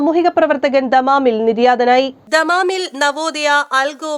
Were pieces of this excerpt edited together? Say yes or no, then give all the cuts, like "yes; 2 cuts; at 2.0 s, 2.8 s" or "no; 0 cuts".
no; 0 cuts